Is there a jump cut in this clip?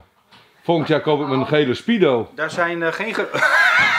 no; 0 cuts

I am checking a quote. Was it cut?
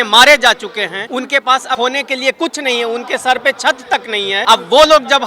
yes; 3 cuts; at 1.0 s, 1.8 s, 4.4 s

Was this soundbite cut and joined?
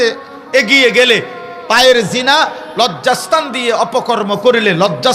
no; 0 cuts

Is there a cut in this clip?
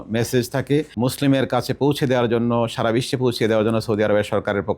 yes; 1 cut; at 0.9 s

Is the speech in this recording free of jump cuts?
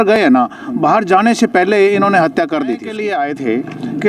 no; 1 cut; at 2.9 s

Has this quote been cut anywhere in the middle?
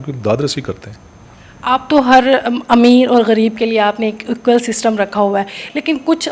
no; 0 cuts

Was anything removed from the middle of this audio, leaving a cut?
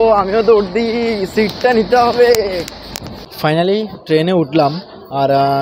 no; 0 cuts

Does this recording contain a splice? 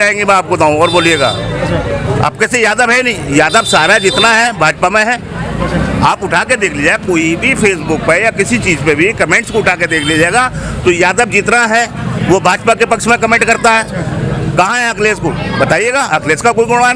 no; 0 cuts

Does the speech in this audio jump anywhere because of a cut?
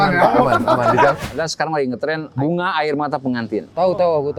yes; 2 cuts; at 1.2 s, 2.3 s

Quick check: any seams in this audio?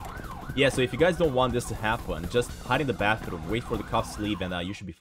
no; 0 cuts

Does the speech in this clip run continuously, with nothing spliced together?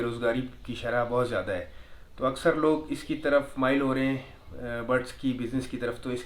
yes; 0 cuts

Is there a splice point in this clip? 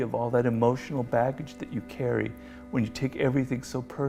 no; 0 cuts

